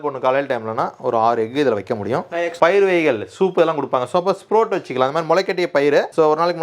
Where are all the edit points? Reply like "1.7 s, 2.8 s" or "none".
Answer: 2.5 s